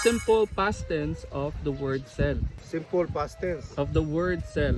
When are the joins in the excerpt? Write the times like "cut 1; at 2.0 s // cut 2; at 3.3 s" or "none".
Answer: cut 1; at 2.5 s